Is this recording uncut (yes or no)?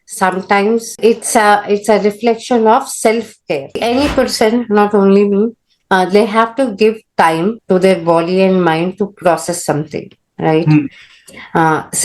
no